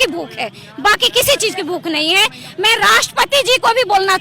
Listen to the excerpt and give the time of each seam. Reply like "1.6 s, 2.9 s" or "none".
none

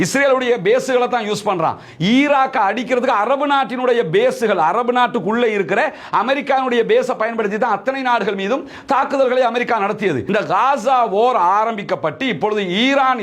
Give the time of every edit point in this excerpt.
10.2 s

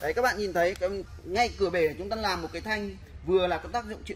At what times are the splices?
1.1 s

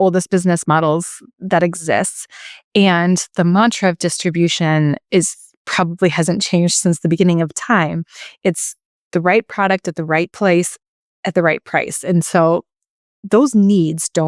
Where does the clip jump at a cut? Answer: 7.1 s, 10.3 s

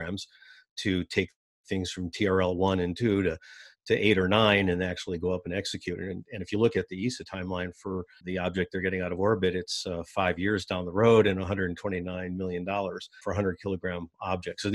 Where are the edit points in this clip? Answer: 8.2 s, 13.2 s

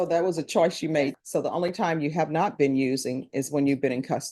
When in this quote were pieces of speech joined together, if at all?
1.1 s

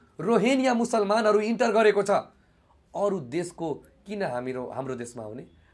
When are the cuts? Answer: none

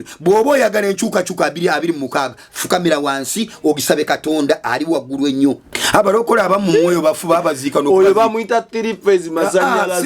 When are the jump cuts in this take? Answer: 5.7 s

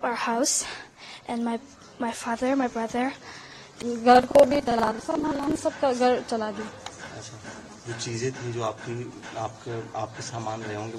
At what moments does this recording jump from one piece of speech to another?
3.6 s

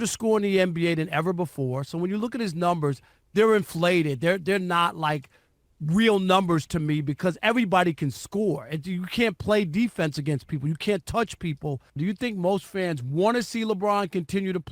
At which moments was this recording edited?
12.0 s

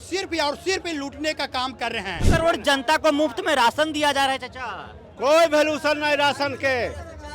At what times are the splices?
2.2 s

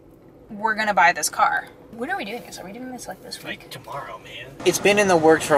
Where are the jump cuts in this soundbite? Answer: 4.6 s

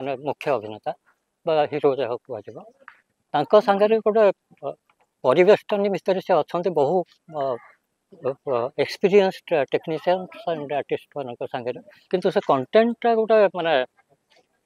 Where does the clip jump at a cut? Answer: 11.9 s

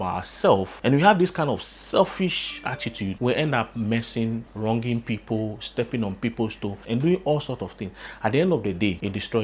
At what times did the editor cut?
none

